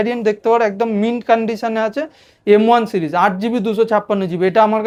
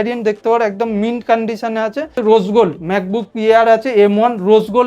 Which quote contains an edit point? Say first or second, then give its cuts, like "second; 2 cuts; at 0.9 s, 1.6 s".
second; 1 cut; at 2.1 s